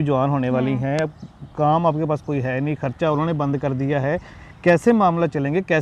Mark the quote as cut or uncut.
uncut